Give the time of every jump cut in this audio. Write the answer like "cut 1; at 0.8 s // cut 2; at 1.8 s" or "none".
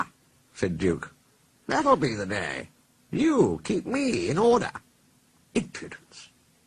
cut 1; at 3.8 s